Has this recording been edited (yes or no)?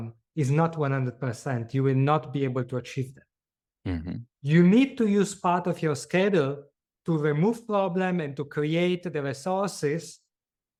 no